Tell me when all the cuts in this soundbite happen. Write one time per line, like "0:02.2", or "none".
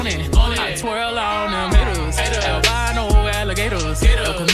none